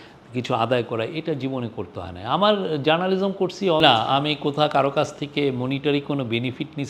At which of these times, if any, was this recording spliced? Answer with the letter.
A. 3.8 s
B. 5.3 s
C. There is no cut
A